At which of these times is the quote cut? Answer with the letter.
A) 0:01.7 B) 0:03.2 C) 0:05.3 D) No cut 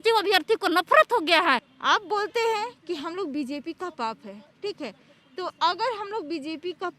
A